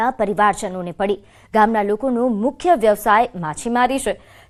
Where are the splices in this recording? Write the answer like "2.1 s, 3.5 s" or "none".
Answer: none